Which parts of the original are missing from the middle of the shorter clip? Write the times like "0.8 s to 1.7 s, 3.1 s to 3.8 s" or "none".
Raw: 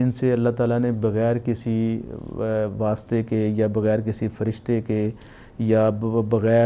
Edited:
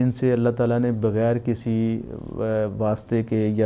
none

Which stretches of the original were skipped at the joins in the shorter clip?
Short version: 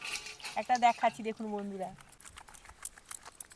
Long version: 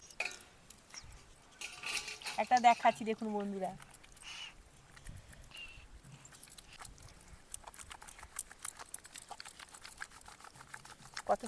4.0 s to 7.8 s

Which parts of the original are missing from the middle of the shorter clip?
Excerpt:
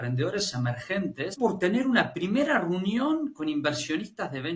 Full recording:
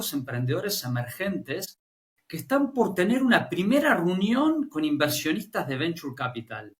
1.7 s to 2.7 s

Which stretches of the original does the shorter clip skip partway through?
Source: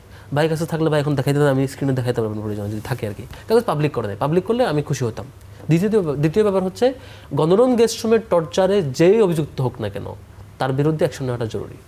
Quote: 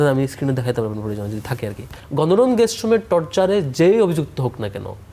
3.3 s to 7.1 s

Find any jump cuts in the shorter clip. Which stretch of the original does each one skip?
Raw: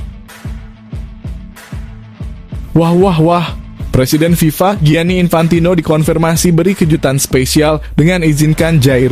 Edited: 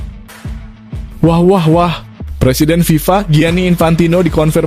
1.1 s to 2.7 s

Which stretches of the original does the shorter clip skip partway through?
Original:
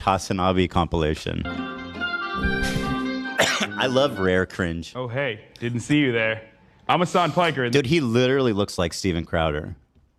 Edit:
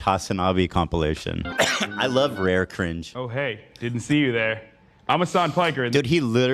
1.5 s to 3.3 s

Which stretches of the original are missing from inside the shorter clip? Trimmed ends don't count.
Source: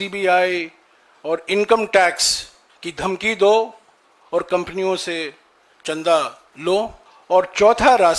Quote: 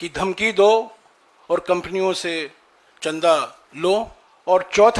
none

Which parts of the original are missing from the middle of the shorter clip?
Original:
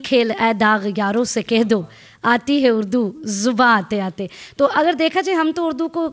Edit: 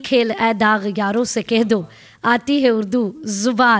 none

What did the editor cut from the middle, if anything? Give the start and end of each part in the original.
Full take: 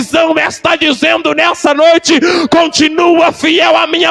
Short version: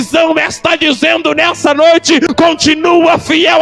2.3 s to 2.4 s

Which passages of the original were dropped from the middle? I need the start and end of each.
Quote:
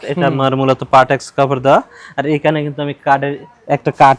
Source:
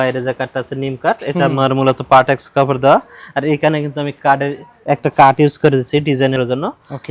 none

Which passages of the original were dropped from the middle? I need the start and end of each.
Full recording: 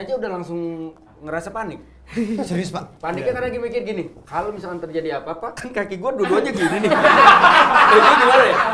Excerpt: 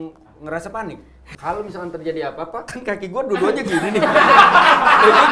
2.0 s to 4.1 s

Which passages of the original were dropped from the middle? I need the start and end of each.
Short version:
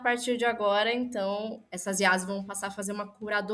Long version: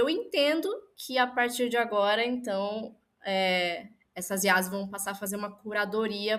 3.0 s to 4.1 s

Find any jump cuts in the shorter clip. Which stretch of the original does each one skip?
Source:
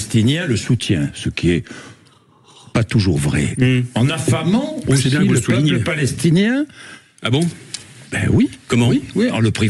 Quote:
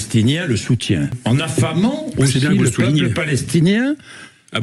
1.2 s to 3.9 s

